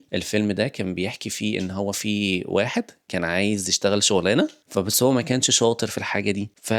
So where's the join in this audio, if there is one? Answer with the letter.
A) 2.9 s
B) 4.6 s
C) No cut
B